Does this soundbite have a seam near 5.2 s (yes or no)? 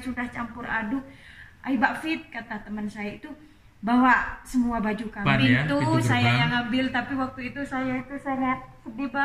yes